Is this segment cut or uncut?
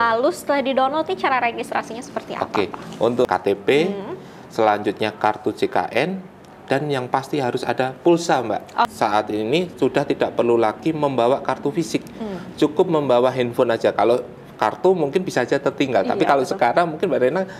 cut